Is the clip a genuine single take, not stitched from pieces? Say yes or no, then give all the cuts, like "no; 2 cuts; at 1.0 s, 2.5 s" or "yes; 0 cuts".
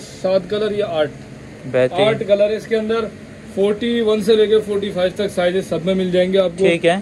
yes; 0 cuts